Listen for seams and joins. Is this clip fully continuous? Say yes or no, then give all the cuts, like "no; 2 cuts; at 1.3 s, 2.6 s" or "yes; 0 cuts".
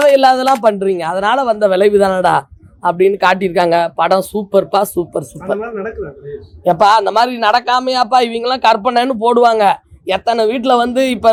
yes; 0 cuts